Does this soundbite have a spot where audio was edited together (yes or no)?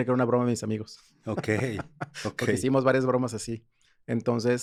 no